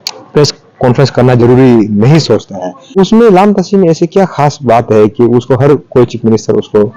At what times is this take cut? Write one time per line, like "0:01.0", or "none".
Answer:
0:02.9